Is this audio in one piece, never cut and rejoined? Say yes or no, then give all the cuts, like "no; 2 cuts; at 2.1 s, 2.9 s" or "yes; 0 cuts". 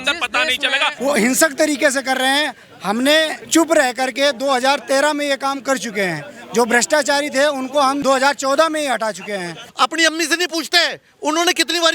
no; 4 cuts; at 0.9 s, 3.4 s, 8.0 s, 9.6 s